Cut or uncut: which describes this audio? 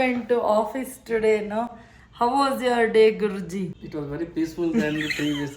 cut